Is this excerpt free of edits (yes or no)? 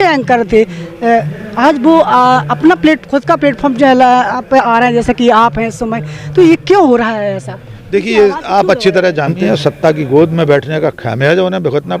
no